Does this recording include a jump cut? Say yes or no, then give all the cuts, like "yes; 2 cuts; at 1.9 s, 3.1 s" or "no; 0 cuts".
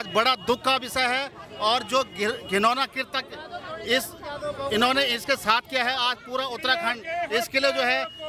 no; 0 cuts